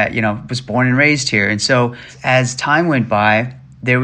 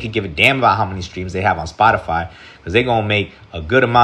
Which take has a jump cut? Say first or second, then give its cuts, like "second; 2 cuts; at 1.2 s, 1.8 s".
first; 1 cut; at 2.1 s